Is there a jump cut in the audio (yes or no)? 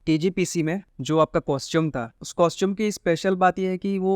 yes